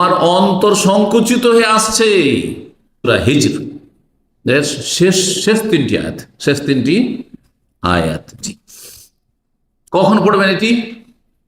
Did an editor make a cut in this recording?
yes; 1 cut; at 3.1 s

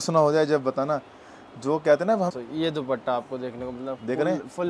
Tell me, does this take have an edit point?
yes; 1 cut; at 2.3 s

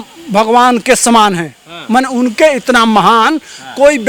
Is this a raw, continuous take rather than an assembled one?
yes; 0 cuts

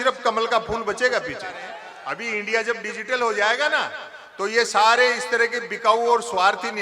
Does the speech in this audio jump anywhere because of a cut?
yes; 1 cut; at 1.8 s

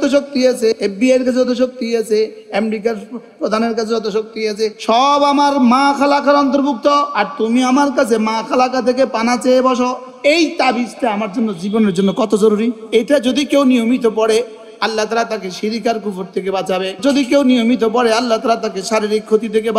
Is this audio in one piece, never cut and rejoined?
no; 5 cuts; at 0.8 s, 7.2 s, 10.1 s, 12.8 s, 17.0 s

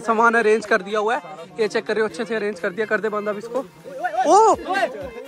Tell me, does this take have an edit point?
no; 0 cuts

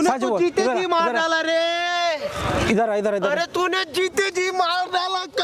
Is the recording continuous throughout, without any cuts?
yes; 0 cuts

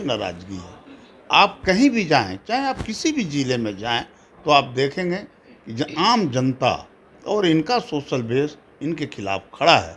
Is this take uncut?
yes; 0 cuts

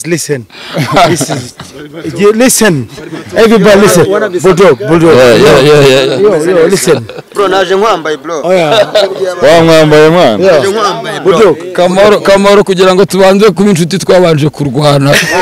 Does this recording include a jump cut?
no; 0 cuts

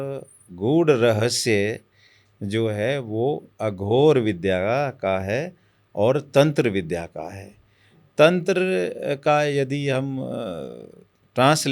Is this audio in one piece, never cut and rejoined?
yes; 0 cuts

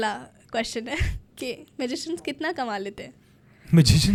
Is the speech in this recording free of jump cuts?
yes; 0 cuts

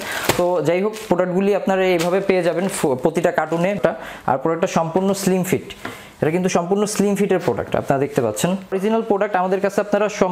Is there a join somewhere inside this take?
yes; 2 cuts; at 3.8 s, 8.7 s

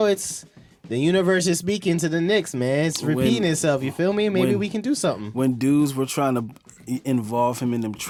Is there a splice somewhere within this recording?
no; 0 cuts

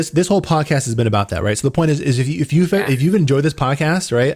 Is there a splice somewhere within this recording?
no; 0 cuts

